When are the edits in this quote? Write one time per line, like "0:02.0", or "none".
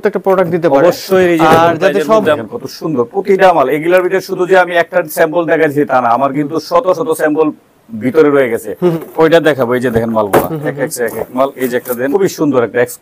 0:02.4
0:09.0
0:12.1